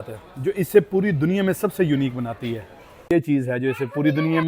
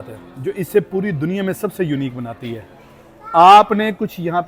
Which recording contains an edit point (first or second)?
first